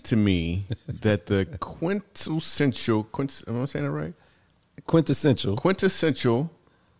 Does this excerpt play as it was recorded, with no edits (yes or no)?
yes